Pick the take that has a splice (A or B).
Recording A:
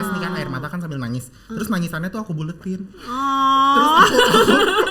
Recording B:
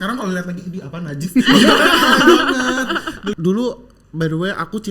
B